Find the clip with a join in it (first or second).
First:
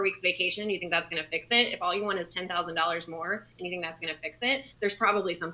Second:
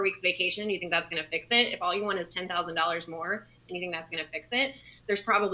first